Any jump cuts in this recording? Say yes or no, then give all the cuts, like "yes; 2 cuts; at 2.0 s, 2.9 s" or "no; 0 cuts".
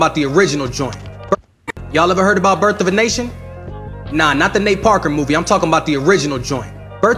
yes; 1 cut; at 1.3 s